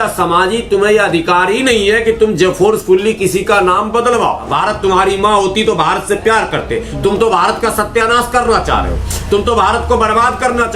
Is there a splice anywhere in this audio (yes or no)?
yes